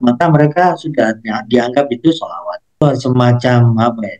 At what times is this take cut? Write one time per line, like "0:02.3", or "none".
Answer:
0:02.8